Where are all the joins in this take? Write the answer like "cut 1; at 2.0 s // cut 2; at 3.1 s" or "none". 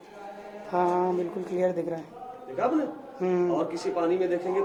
none